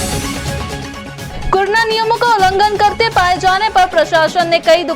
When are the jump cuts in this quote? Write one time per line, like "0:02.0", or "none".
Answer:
0:01.2